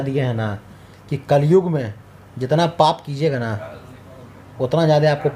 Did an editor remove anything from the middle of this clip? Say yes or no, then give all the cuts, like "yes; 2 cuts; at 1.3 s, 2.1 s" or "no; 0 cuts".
no; 0 cuts